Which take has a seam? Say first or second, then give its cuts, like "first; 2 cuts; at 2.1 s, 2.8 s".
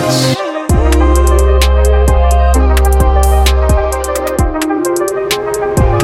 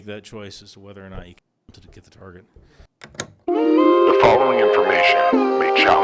second; 1 cut; at 3.0 s